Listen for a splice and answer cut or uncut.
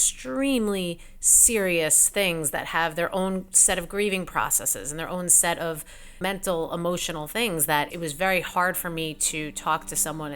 cut